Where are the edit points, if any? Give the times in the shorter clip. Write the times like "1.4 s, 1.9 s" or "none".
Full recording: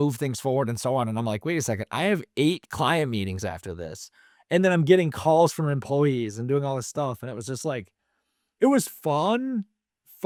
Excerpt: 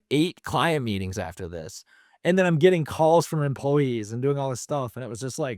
none